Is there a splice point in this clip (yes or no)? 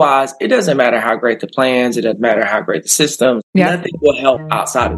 yes